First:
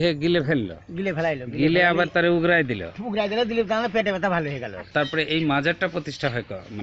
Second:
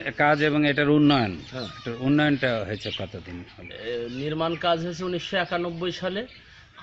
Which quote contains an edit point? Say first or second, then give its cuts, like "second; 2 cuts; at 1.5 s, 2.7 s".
first; 1 cut; at 4.8 s